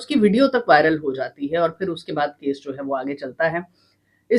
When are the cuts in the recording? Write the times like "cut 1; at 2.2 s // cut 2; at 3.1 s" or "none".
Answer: none